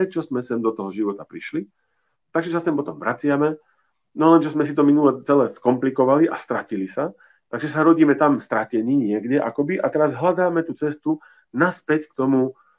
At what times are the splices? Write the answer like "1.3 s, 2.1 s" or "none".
none